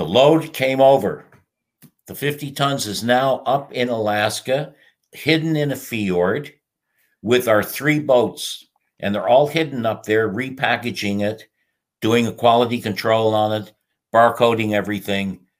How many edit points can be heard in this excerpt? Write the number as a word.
zero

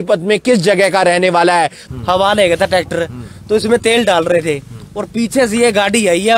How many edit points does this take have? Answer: one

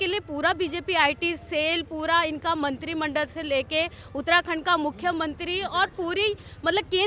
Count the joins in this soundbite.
zero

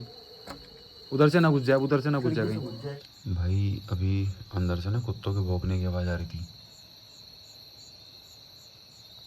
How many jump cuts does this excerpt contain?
one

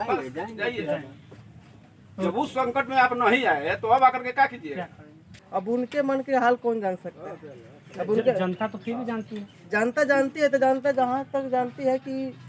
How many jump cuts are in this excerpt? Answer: one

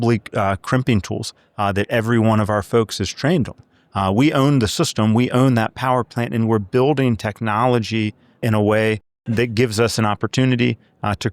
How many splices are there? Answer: one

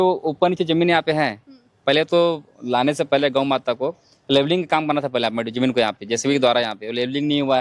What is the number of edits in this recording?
zero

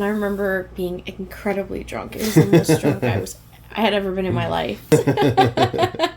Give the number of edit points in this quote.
one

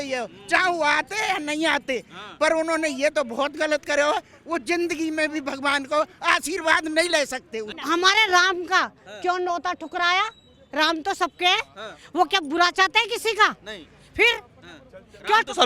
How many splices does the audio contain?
one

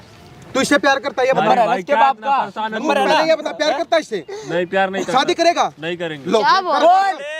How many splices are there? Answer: zero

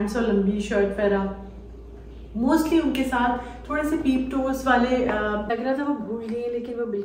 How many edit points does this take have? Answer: one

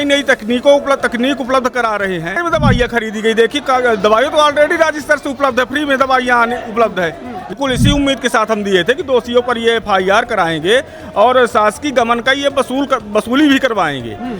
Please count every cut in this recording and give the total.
two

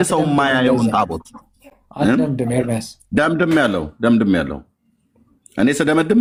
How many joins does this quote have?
zero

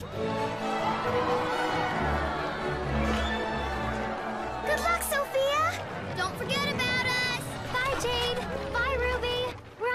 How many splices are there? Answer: one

